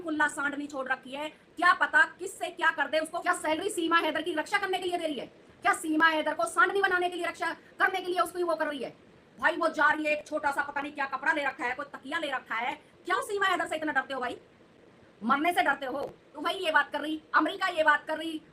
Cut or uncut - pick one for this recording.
cut